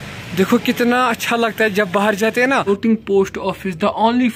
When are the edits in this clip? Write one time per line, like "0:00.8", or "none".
0:02.6